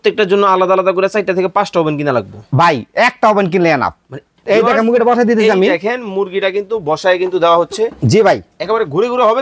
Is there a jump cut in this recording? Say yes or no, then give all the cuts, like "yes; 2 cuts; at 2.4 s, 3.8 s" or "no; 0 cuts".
yes; 1 cut; at 4.3 s